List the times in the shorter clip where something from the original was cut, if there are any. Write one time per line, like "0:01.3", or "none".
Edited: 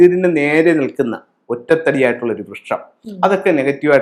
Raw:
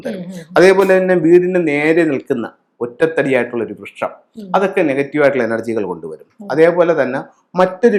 none